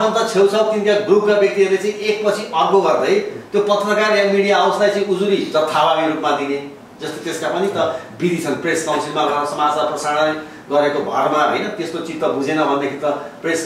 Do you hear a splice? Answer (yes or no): no